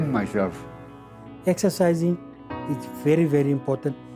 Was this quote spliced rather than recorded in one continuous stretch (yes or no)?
yes